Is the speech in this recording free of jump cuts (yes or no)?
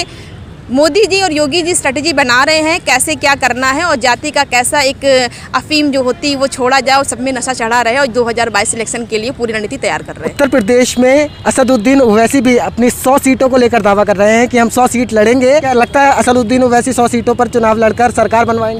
yes